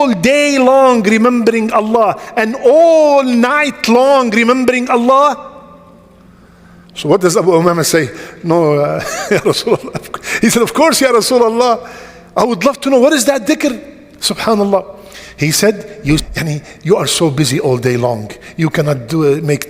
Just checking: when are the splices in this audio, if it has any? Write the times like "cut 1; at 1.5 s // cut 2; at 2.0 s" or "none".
cut 1; at 16.2 s